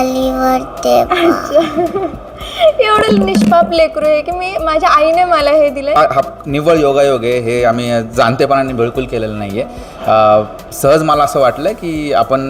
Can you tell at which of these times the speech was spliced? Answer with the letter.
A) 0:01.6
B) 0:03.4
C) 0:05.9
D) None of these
C